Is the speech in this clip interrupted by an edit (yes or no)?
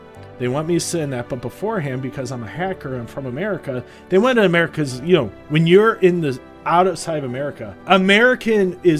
yes